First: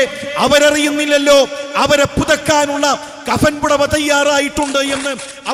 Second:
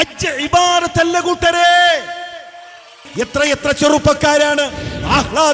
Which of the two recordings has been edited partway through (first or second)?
second